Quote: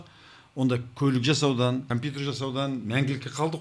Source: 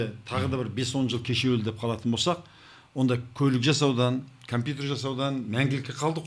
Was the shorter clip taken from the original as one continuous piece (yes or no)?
no